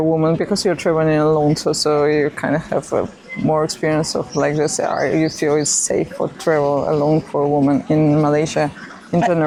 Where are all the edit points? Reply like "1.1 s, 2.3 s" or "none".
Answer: none

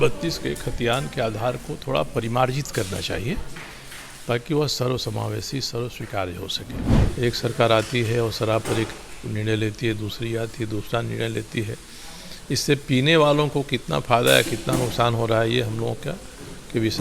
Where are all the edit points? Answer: 7.1 s

